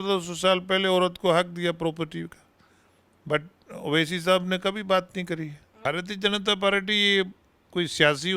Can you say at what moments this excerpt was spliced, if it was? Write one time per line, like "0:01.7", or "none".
0:05.7